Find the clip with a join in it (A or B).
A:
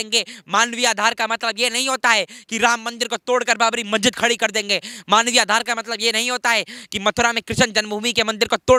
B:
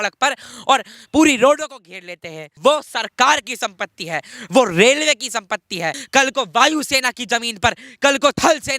B